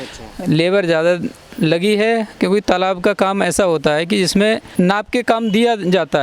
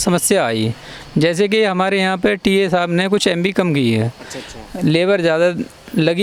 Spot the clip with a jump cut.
first; 1 cut; at 4.7 s

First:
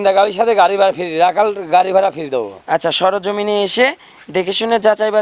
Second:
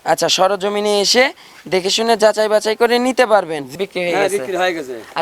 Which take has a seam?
second; 1 cut; at 3.7 s

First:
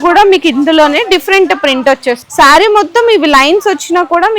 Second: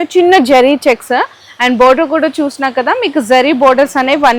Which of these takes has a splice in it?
first; 1 cut; at 2.2 s

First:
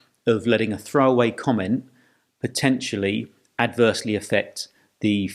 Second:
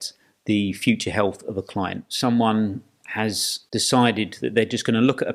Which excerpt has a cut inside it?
second; 1 cut; at 2.0 s

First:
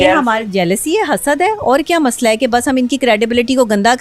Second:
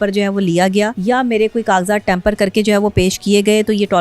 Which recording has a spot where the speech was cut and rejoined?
second; 1 cut; at 1.0 s

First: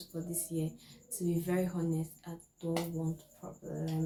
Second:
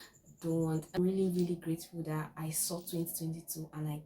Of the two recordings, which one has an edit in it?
second; 1 cut; at 1.0 s

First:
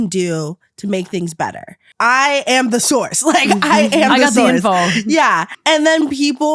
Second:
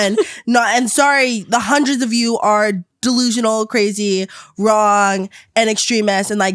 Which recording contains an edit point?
first; 2 cuts; at 1.8 s, 5.5 s

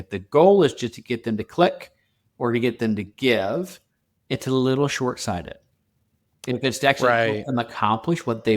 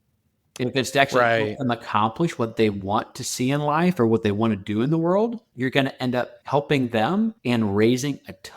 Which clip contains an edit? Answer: second; 3 cuts; at 5.5 s, 6.4 s, 7.4 s

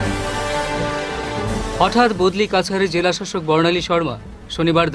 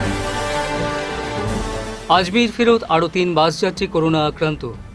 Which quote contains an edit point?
first; 1 cut; at 1.6 s

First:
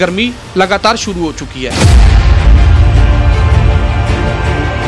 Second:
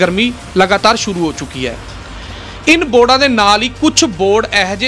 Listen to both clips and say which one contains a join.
first; 1 cut; at 1.7 s

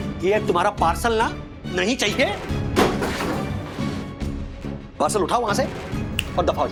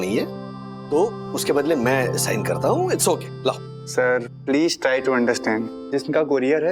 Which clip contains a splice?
second; 1 cut; at 5.8 s

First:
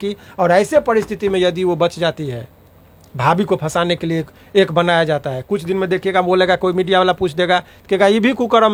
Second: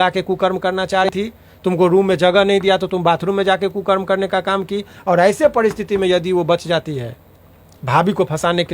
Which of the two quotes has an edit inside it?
second; 1 cut; at 1.1 s

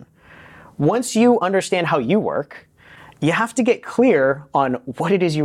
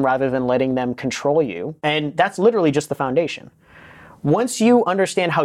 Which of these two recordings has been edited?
second; 1 cut; at 1.7 s

